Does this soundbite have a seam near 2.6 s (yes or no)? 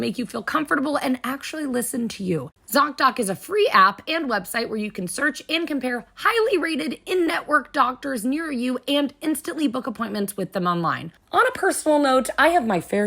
yes